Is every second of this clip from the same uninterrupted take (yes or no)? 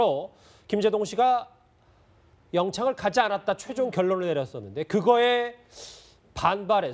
yes